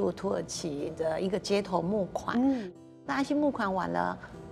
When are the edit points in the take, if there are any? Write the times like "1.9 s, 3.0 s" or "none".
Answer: 2.7 s